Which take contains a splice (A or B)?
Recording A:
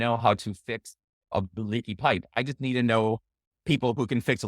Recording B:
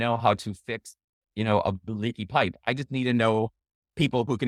A